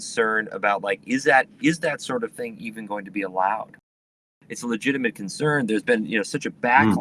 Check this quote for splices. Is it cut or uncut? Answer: cut